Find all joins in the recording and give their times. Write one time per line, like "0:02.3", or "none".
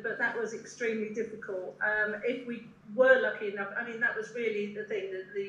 none

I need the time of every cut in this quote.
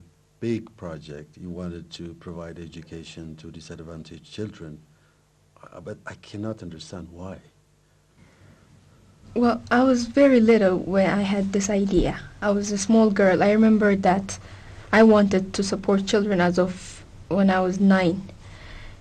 0:16.5

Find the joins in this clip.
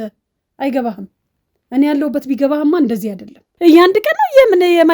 0:03.5

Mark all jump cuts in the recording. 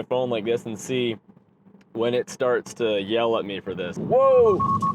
0:03.9

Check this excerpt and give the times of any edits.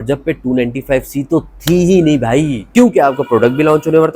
0:02.6

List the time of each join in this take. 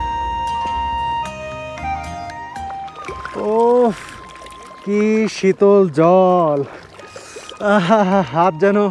0:03.0

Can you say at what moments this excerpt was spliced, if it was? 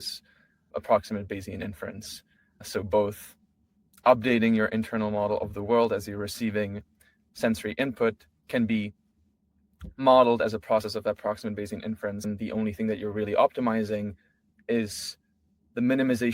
0:12.3

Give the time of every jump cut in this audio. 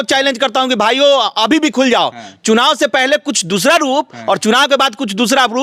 none

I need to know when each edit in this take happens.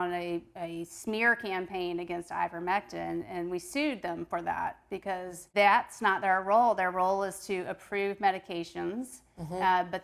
none

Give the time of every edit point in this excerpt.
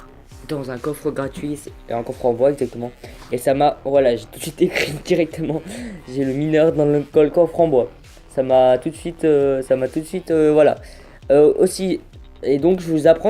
0:01.3

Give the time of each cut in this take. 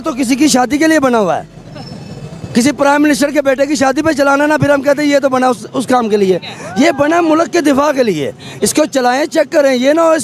none

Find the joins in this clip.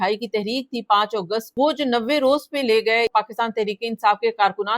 0:01.5
0:03.1

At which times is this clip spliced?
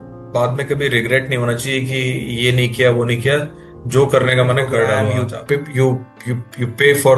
0:05.2

